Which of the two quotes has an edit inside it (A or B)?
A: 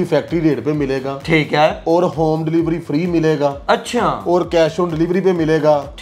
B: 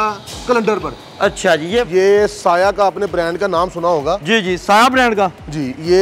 B